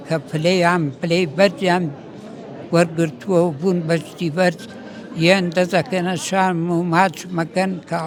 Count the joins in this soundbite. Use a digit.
0